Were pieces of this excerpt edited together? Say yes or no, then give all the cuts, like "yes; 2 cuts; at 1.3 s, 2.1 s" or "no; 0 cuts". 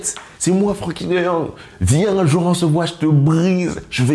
no; 0 cuts